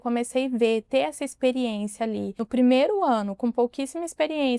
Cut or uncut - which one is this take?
cut